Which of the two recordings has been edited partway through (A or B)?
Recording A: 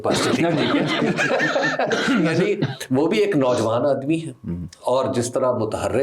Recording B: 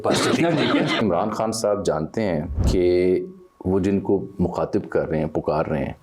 B